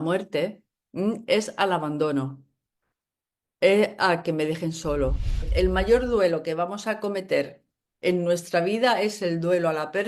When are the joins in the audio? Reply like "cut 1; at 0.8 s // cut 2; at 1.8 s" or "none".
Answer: cut 1; at 5.5 s